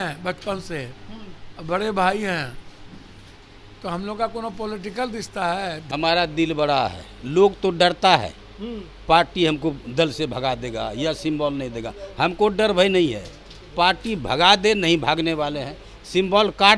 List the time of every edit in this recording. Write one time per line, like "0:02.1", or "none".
0:05.8